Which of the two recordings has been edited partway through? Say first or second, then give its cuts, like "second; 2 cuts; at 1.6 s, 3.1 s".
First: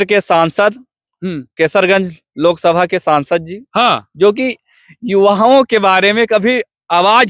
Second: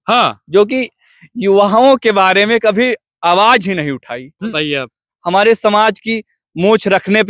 second; 1 cut; at 4.5 s